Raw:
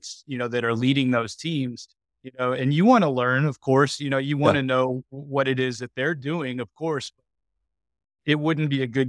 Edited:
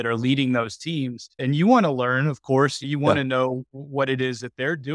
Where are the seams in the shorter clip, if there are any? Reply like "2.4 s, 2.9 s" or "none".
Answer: 1.4 s, 2.8 s